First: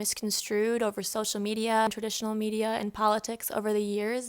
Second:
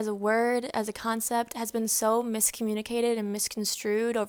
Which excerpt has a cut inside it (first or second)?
first